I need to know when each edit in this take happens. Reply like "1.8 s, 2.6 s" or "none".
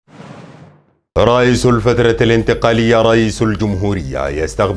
0.9 s

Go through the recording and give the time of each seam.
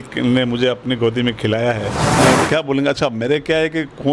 2.0 s

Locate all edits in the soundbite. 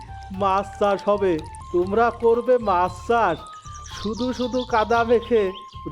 1.5 s

